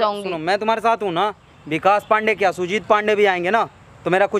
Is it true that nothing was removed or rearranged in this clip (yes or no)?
yes